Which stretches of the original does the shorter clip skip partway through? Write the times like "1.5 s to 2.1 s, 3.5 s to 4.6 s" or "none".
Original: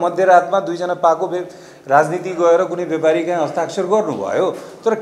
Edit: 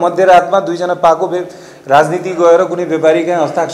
none